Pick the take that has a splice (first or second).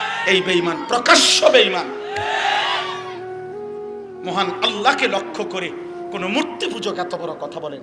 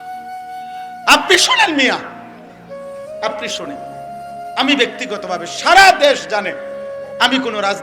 second